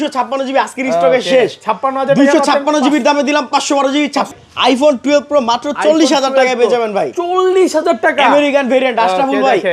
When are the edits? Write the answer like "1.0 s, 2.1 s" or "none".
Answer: 4.3 s